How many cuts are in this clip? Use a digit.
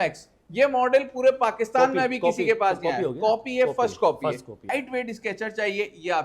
1